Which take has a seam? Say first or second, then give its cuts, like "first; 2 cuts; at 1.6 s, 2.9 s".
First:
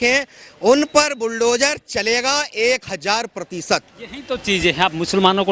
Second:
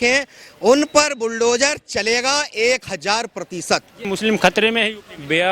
second; 1 cut; at 4.0 s